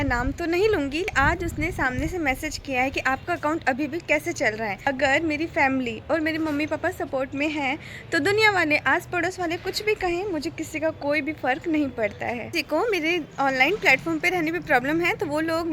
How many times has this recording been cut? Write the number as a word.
three